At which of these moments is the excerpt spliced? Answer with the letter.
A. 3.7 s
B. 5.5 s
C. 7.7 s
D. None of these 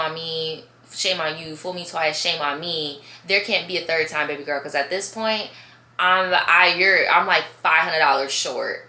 D